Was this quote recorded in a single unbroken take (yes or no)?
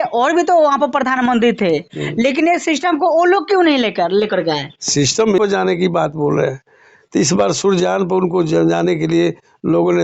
no